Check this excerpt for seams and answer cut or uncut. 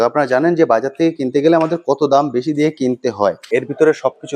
cut